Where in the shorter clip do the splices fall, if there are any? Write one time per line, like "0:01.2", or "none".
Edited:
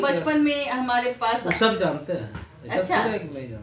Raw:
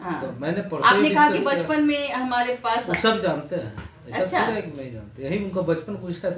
none

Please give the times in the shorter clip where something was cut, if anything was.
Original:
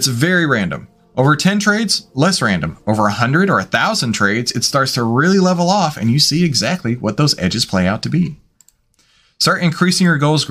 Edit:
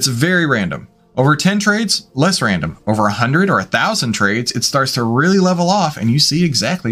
none

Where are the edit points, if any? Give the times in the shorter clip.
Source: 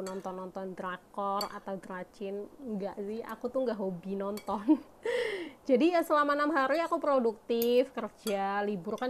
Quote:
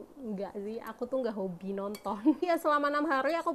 0:02.4

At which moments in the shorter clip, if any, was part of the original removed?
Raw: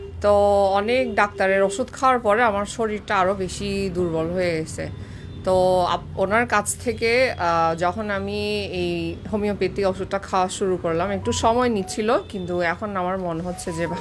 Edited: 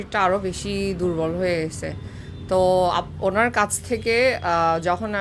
none

